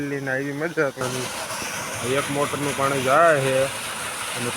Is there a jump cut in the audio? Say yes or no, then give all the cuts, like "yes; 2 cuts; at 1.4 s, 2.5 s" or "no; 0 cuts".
yes; 1 cut; at 1.0 s